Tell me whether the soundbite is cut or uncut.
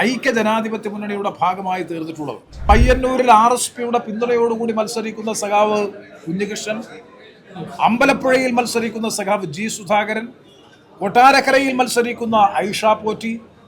cut